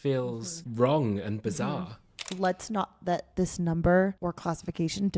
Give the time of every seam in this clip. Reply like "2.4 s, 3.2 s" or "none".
2.3 s, 3.3 s